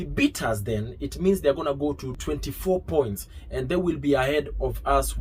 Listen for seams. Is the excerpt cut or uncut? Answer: cut